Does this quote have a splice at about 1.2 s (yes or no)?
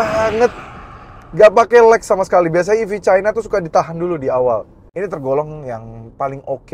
no